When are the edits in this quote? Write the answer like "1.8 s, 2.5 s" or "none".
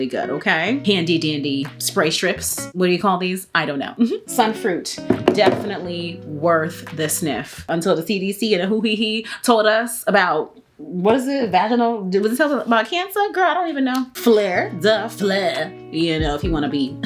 0.8 s, 4.3 s, 7.6 s, 14.1 s